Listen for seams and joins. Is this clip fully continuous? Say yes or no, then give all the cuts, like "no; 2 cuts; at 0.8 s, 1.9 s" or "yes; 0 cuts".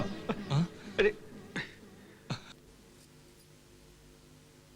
yes; 0 cuts